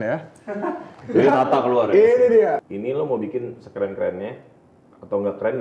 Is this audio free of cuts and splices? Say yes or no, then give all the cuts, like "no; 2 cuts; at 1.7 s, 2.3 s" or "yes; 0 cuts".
no; 1 cut; at 2.7 s